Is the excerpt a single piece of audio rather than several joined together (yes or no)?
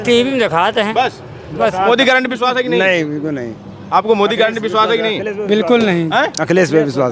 yes